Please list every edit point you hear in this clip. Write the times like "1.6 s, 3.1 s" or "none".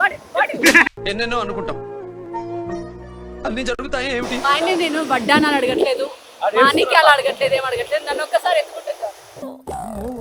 none